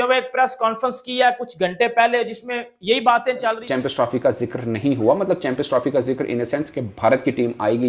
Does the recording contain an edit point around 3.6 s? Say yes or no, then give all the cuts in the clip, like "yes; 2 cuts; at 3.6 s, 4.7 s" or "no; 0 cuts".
yes; 1 cut; at 3.6 s